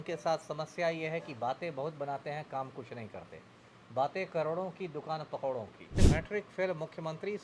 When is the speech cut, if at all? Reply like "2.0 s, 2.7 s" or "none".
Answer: 6.0 s